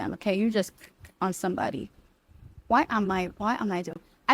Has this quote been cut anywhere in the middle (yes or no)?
no